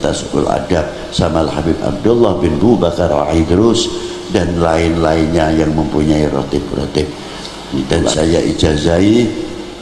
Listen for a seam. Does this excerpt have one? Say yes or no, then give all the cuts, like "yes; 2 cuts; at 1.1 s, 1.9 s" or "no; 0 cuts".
yes; 1 cut; at 7.9 s